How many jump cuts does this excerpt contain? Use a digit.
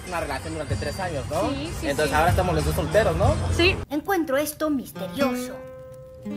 0